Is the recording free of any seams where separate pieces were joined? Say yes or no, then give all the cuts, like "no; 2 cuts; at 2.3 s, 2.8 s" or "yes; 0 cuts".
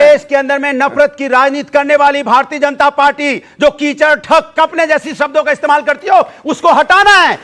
yes; 0 cuts